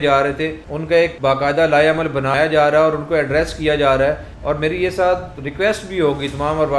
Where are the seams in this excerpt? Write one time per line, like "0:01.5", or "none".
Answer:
0:00.9
0:02.3
0:04.3